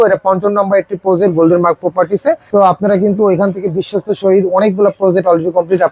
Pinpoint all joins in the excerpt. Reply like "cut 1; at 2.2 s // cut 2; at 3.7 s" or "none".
cut 1; at 2.4 s